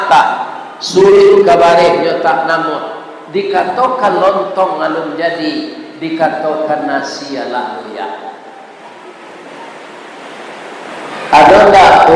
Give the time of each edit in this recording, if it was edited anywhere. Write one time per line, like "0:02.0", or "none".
0:10.9